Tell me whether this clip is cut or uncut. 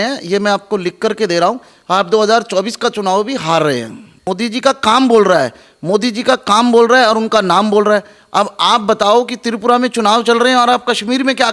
cut